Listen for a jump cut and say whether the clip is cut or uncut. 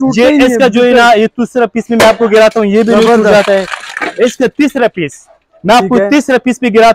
uncut